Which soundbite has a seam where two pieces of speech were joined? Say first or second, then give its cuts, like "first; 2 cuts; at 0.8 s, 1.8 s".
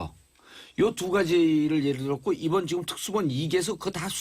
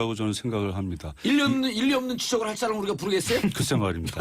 first; 1 cut; at 1.3 s